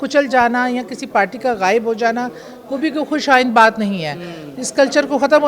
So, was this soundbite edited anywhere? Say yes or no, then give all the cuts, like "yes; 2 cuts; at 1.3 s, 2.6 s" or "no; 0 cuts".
no; 0 cuts